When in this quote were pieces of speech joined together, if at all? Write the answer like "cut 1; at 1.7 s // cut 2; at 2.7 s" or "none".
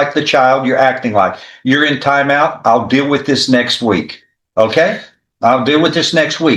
none